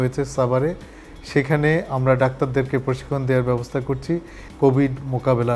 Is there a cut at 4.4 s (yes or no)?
yes